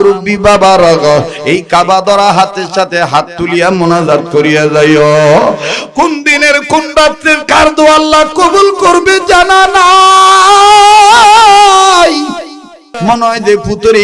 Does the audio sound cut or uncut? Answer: cut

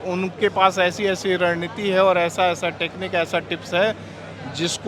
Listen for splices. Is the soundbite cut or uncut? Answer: uncut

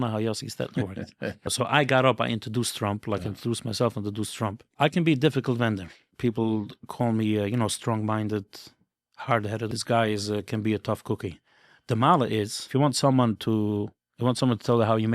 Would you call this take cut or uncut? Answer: cut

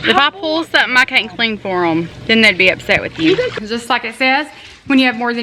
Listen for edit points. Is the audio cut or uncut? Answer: cut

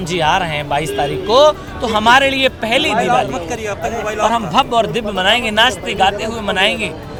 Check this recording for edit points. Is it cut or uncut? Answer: uncut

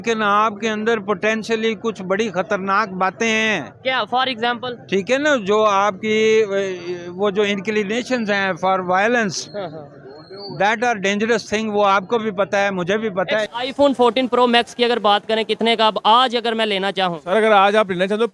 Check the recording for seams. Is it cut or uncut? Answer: cut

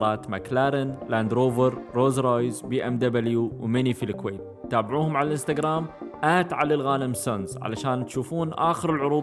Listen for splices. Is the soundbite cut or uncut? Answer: uncut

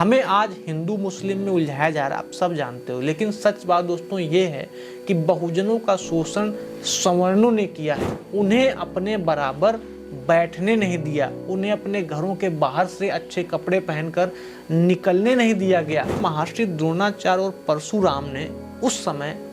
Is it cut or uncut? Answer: cut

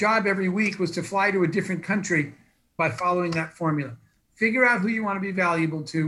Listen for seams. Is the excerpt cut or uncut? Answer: cut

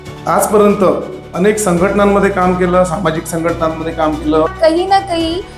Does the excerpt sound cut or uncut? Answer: cut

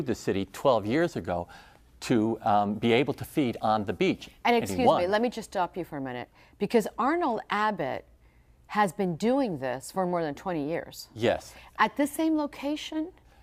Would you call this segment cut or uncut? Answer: uncut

